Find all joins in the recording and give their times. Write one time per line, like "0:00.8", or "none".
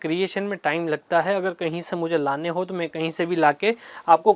none